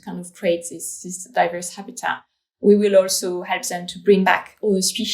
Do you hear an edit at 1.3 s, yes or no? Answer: no